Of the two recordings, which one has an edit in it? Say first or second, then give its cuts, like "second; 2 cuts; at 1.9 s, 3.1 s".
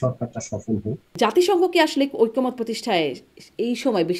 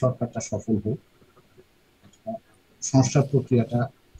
first; 1 cut; at 1.0 s